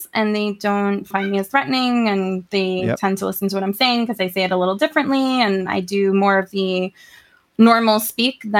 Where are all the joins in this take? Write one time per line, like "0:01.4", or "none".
0:01.1